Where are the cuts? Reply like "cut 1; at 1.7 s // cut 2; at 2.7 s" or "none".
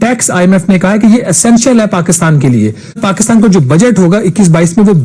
cut 1; at 3.0 s